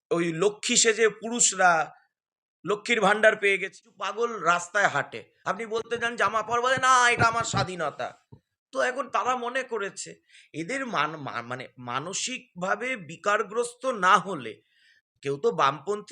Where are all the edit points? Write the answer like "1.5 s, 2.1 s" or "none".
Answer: 3.7 s